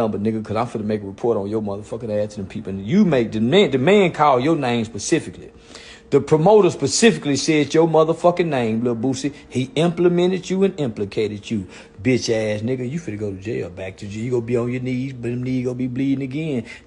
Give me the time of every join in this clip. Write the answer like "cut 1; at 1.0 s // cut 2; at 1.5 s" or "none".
none